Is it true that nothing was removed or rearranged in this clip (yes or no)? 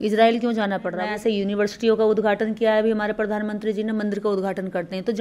no